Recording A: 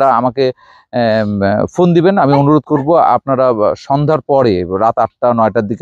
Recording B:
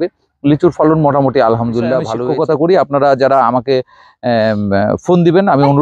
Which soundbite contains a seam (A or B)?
B